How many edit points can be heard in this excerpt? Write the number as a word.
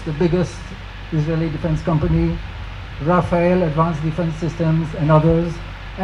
zero